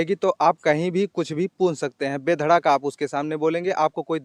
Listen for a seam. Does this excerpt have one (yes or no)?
no